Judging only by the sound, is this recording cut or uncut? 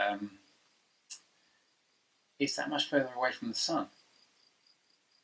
cut